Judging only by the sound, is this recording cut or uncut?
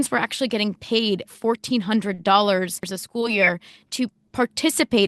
cut